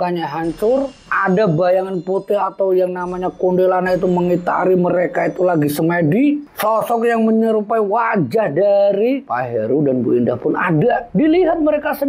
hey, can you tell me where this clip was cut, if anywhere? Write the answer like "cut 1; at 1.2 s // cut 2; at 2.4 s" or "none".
cut 1; at 6.4 s